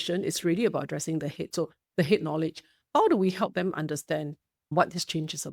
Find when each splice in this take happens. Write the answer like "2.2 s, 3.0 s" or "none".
1.5 s